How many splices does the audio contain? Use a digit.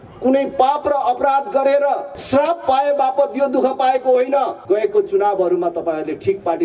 2